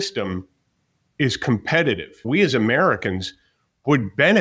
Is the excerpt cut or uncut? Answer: cut